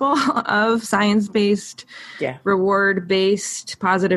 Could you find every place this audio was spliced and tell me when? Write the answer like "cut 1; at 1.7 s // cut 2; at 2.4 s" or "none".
none